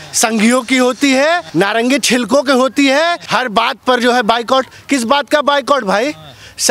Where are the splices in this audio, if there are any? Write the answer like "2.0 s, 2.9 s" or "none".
1.5 s, 3.2 s